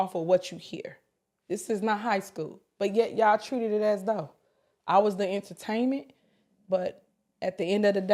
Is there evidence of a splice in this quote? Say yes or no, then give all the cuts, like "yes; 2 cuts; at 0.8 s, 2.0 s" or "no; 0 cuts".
no; 0 cuts